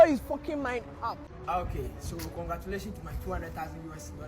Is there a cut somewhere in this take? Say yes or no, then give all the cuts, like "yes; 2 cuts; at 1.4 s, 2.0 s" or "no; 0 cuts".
yes; 1 cut; at 1.3 s